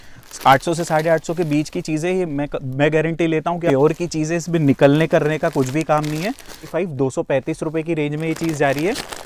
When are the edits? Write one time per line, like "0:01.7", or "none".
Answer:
0:03.7
0:06.7